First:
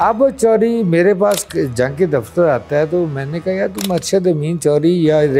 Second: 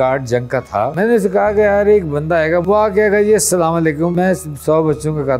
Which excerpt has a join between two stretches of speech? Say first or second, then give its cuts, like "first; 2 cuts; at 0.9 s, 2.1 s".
second; 3 cuts; at 0.9 s, 2.6 s, 4.1 s